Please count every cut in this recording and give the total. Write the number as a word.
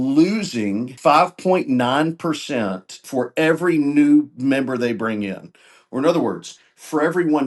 two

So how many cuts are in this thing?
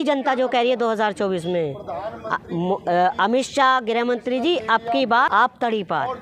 one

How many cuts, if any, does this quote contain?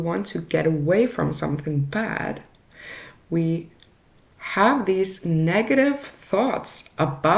zero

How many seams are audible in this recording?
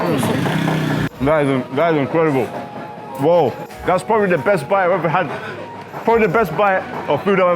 two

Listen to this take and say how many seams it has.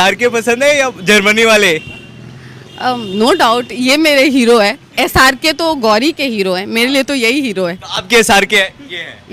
zero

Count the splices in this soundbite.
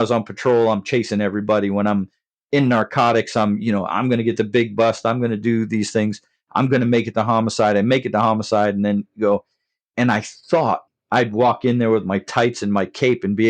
one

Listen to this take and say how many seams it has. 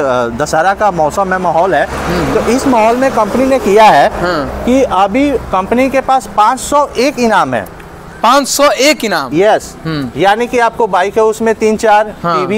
zero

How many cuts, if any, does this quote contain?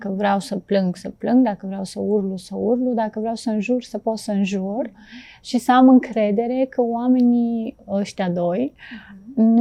zero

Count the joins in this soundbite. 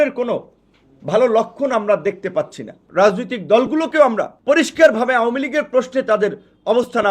two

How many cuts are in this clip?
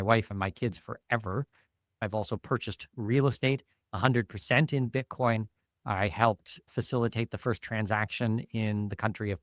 one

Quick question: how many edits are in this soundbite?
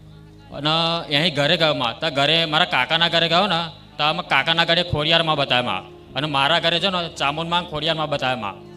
zero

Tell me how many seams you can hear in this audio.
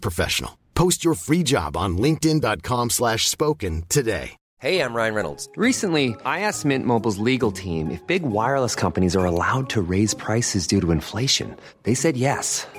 one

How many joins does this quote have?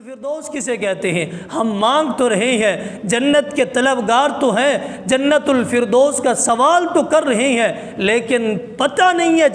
zero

